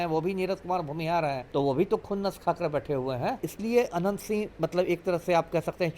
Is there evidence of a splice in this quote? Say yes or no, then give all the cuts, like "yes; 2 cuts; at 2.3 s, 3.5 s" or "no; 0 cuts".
yes; 2 cuts; at 1.4 s, 3.5 s